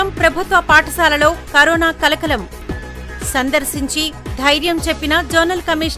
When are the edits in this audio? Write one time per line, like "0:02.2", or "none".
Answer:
none